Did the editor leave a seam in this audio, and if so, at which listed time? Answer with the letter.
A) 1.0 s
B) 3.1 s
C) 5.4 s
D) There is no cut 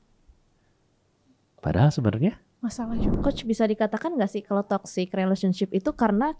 B